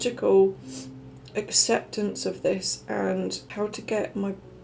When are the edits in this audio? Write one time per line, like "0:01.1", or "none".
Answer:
0:03.4